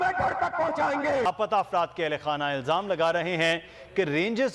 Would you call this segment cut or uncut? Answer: cut